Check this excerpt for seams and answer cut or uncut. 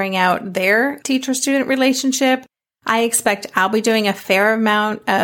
cut